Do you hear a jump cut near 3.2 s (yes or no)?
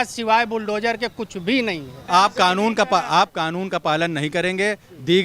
no